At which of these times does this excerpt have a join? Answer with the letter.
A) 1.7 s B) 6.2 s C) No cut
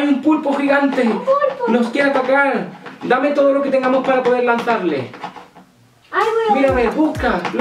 C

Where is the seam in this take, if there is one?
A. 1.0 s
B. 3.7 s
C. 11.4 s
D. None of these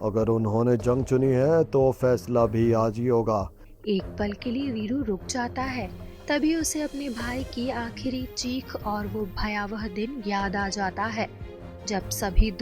B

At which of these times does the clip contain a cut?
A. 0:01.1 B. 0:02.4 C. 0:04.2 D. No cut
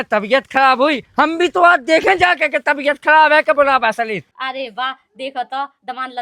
C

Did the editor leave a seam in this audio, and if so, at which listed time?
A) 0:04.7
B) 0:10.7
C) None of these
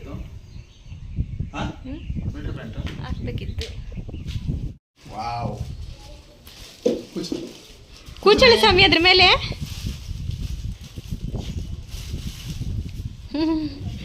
A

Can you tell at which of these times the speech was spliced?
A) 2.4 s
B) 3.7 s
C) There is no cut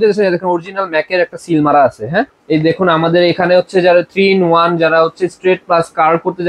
A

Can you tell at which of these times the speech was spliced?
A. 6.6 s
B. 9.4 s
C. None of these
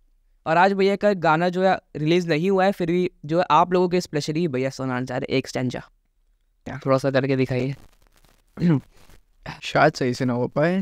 A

